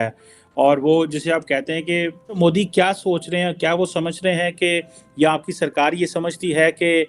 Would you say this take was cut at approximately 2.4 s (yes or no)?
yes